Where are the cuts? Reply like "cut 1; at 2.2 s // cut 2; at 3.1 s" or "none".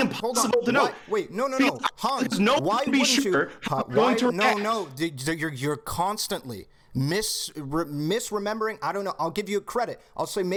none